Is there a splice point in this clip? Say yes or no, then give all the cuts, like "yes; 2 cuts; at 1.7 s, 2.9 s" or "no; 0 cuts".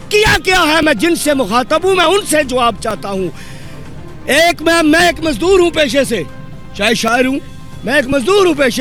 no; 0 cuts